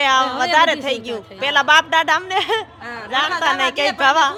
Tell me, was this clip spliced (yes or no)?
no